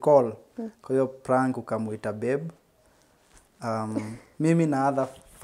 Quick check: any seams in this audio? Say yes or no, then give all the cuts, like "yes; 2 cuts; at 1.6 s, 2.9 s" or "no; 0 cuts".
no; 0 cuts